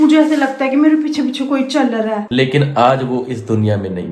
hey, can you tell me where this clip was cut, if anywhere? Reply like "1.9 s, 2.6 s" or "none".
2.2 s